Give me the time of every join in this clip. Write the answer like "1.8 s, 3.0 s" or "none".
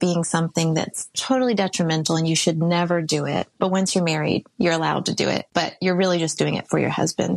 3.5 s